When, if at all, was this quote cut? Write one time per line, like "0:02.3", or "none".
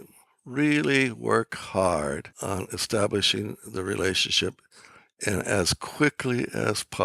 0:02.3